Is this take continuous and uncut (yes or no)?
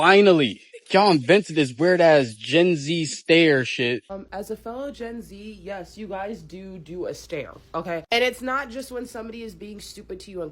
no